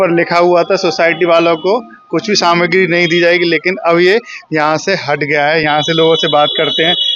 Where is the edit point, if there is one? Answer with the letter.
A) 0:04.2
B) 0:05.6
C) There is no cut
C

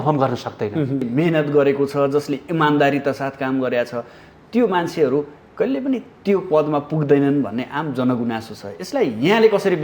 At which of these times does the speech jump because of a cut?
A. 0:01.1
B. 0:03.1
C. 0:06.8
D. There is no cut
A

